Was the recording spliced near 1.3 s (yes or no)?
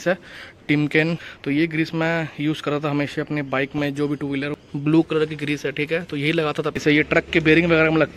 yes